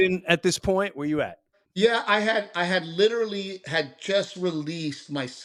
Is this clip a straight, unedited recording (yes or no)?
yes